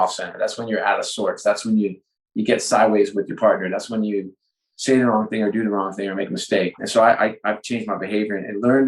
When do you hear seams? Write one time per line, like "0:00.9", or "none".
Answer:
0:06.8